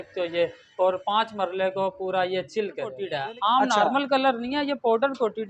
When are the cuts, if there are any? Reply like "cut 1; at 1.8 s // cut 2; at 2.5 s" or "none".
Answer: cut 1; at 3.1 s